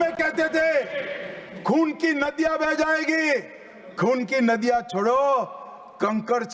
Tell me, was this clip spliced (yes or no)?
no